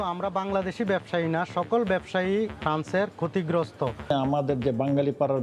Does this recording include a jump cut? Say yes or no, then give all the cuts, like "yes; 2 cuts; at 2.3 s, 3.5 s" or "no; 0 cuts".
yes; 1 cut; at 4.0 s